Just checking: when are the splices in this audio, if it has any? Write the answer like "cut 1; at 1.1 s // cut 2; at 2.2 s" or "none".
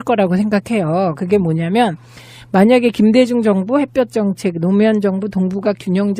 none